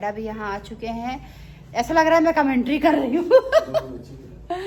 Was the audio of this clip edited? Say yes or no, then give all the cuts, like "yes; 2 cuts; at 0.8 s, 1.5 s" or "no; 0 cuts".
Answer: no; 0 cuts